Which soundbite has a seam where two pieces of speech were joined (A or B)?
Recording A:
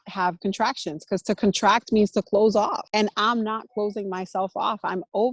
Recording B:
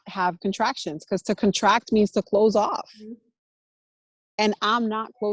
A